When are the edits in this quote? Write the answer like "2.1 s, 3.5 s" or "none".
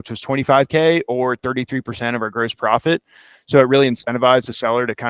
none